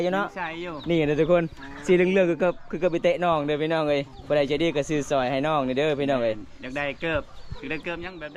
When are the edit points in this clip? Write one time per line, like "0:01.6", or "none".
none

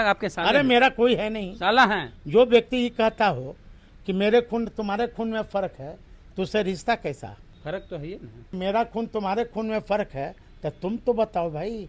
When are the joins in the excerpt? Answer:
0:07.5
0:08.5

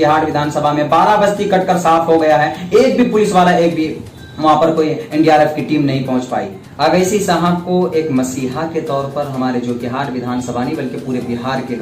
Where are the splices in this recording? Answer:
0:06.6

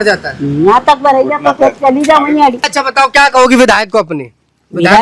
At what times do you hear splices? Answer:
0:02.8

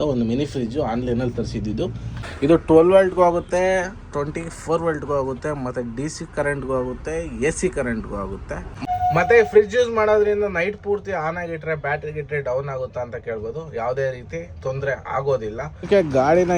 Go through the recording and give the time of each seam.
0:02.2
0:08.7
0:15.9

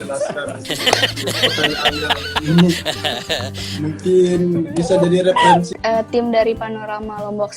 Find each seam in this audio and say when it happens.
0:05.7

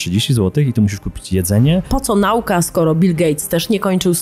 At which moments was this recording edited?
0:01.9

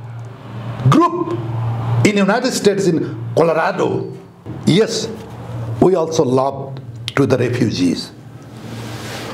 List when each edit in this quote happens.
0:04.5

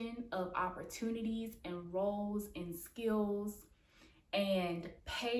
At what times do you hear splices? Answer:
none

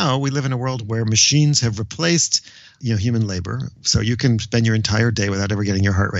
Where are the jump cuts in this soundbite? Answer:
0:02.8

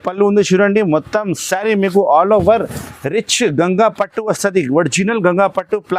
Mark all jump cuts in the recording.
none

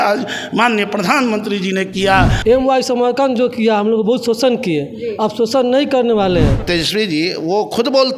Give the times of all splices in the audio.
0:02.3
0:06.6

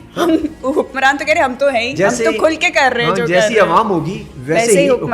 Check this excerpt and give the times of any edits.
none

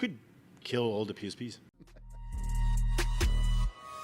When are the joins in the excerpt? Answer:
0:02.1

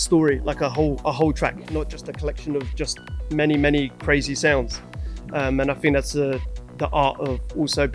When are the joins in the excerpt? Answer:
none

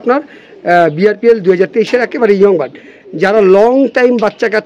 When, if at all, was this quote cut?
none

